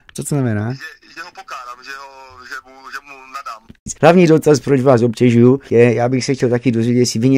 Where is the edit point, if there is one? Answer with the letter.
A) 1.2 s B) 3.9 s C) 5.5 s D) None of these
B